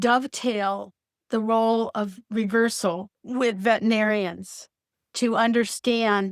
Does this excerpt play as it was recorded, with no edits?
yes; 0 cuts

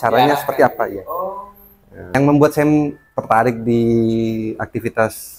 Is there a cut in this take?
yes; 1 cut; at 2.1 s

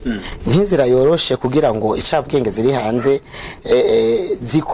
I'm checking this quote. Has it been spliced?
no; 0 cuts

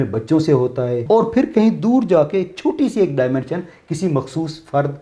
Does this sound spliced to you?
yes; 1 cut; at 1.0 s

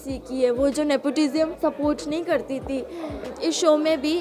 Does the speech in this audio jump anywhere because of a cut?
yes; 2 cuts; at 1.5 s, 3.3 s

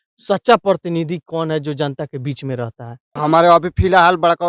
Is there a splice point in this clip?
yes; 1 cut; at 3.1 s

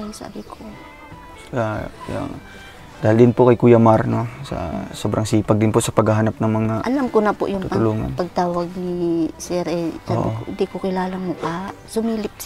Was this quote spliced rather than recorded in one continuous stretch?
no; 0 cuts

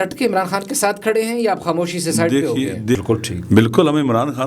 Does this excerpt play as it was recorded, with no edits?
no; 1 cut; at 3.0 s

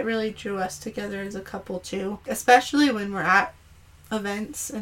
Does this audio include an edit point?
yes; 1 cut; at 2.2 s

